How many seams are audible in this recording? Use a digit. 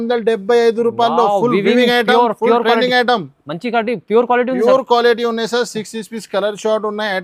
0